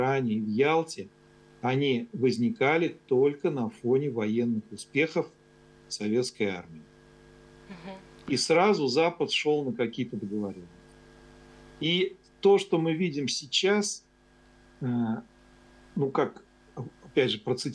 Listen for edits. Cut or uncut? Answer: uncut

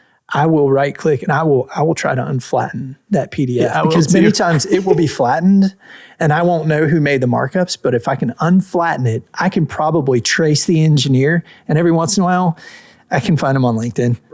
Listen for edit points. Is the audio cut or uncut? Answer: uncut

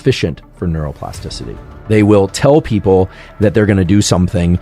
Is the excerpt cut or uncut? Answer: cut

